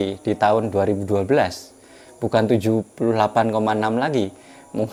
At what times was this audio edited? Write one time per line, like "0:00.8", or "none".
none